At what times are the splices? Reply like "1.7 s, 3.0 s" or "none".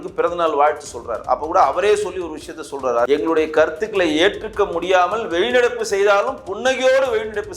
3.1 s